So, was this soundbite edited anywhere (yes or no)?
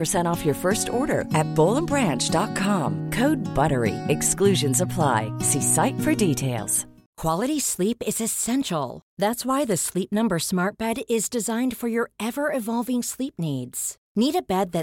yes